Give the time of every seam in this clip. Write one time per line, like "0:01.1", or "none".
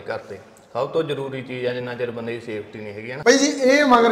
0:03.2

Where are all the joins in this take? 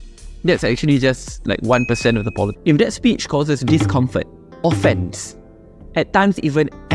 0:02.5

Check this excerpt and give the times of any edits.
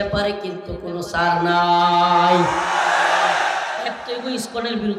0:04.0

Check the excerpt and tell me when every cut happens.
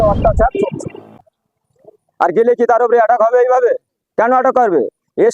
0:01.4

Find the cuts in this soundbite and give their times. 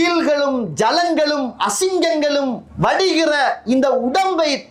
none

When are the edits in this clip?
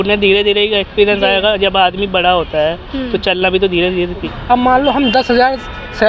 0:04.2

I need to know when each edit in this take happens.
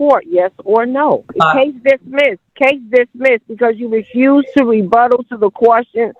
0:01.3
0:02.4

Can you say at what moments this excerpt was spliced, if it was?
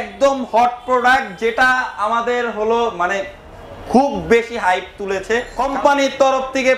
0:05.6

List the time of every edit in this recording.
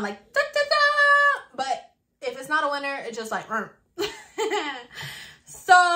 none

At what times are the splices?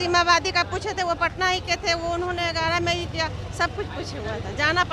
none

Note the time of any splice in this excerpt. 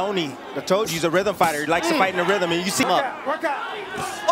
0:02.8

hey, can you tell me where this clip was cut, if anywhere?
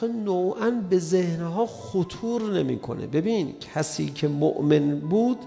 none

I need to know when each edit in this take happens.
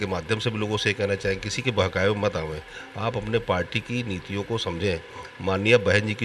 none

